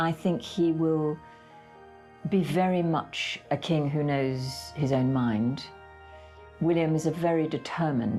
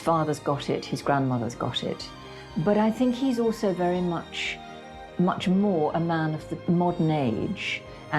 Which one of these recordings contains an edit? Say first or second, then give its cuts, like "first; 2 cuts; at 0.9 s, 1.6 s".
second; 2 cuts; at 2.2 s, 6.6 s